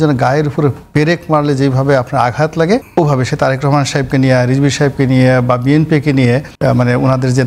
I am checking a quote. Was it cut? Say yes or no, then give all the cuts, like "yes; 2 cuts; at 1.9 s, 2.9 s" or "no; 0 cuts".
yes; 2 cuts; at 2.9 s, 6.5 s